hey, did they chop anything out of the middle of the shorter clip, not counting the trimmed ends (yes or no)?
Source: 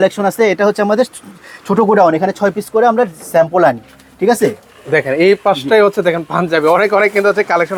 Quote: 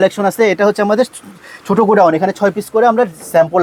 no